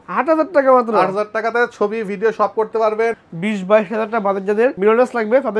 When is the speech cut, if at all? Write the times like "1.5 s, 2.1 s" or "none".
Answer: 3.2 s